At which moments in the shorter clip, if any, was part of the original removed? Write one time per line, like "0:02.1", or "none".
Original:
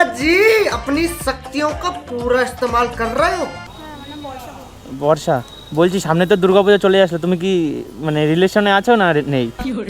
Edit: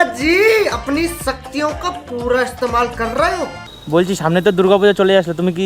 0:03.7